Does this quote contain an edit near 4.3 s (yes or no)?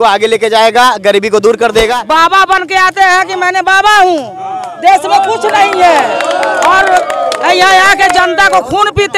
no